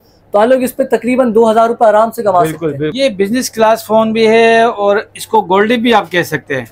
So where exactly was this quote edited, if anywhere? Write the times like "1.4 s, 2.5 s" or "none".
2.9 s